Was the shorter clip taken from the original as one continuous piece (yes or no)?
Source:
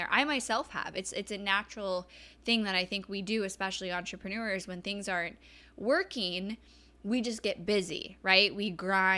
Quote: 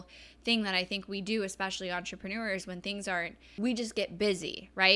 no